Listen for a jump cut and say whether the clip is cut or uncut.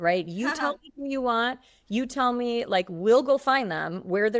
uncut